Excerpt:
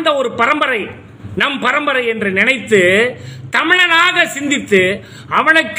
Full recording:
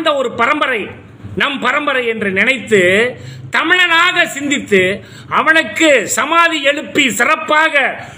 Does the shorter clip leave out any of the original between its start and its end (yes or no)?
no